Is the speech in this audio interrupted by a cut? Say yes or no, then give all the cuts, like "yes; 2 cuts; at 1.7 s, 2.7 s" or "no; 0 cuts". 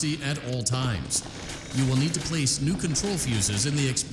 no; 0 cuts